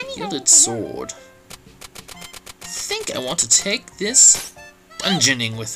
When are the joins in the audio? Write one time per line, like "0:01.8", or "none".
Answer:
0:01.9